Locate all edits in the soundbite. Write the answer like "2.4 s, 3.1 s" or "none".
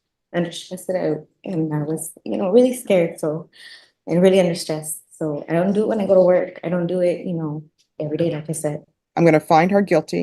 8.7 s